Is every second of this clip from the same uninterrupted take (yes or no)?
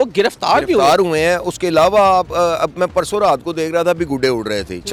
yes